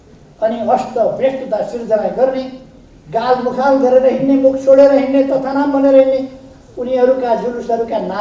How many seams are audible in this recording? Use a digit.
0